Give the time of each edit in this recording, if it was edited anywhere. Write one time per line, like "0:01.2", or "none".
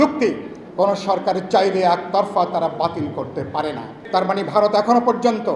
0:03.9